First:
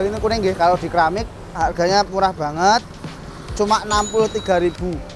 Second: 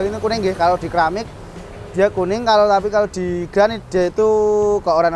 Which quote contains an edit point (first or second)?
first